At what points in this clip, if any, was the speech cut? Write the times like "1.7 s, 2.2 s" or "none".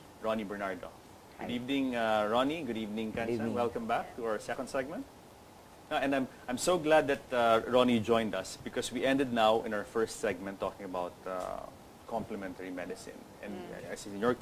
none